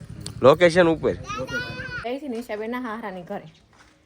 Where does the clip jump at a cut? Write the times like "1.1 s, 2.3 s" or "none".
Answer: 2.0 s